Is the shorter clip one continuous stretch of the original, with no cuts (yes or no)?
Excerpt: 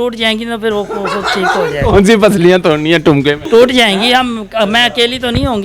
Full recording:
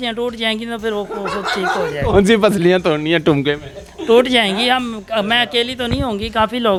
no